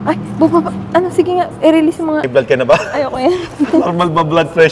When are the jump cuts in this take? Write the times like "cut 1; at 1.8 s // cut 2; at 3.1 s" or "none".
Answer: cut 1; at 2.2 s